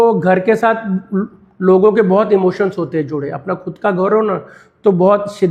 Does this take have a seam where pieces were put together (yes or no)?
no